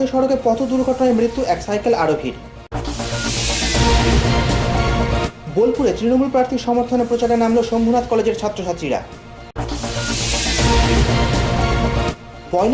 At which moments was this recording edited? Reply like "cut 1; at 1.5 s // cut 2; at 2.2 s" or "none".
cut 1; at 2.5 s // cut 2; at 5.3 s